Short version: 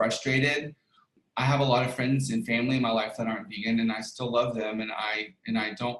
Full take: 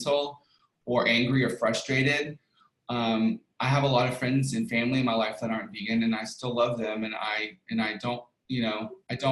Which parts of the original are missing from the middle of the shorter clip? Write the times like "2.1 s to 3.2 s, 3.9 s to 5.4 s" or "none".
2.8 s to 3.4 s